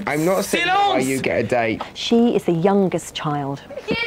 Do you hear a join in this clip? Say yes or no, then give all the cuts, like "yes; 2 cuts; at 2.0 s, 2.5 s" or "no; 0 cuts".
yes; 1 cut; at 1.8 s